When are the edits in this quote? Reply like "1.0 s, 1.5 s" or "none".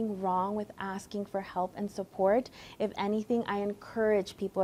none